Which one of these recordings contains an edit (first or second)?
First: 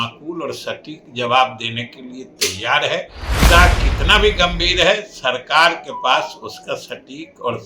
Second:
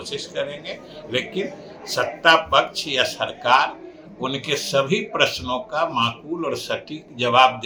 first